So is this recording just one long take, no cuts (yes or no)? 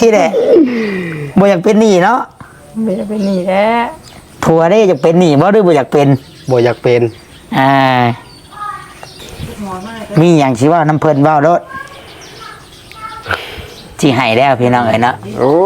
no